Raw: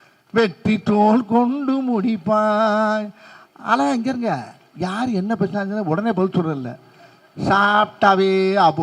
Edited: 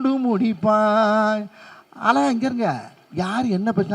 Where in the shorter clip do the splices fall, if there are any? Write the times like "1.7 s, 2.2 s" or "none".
none